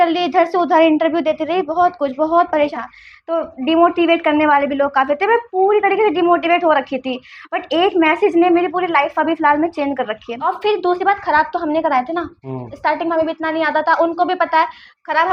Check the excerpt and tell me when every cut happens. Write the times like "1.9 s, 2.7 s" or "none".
2.7 s, 10.4 s